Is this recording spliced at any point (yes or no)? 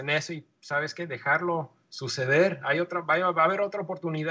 no